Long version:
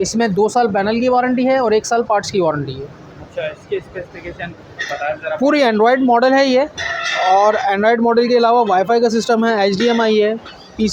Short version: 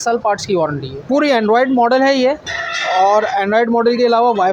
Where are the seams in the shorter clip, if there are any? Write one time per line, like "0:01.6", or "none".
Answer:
0:01.0